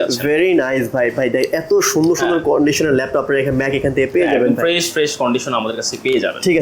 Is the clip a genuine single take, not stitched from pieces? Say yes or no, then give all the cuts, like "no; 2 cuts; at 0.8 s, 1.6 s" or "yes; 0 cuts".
yes; 0 cuts